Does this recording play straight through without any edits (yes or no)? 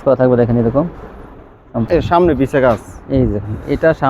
no